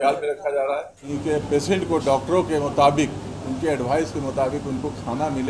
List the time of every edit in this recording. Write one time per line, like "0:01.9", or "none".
0:01.0